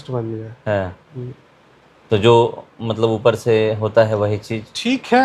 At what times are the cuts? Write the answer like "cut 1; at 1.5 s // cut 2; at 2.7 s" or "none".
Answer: none